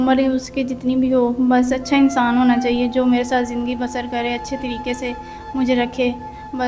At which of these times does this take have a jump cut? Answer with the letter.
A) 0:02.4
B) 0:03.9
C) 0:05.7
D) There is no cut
D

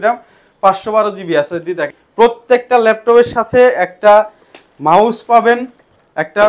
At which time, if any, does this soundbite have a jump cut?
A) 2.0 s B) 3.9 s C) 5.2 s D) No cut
A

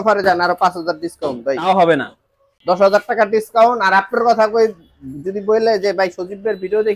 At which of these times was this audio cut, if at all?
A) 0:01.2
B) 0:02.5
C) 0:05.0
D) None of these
B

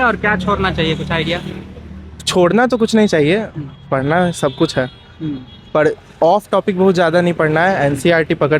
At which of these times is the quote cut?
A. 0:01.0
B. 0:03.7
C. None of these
C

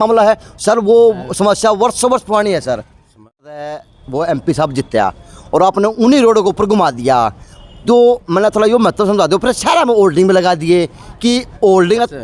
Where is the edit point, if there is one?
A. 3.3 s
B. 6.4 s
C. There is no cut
A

